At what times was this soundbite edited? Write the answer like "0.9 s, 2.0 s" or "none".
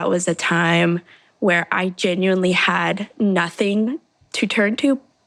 none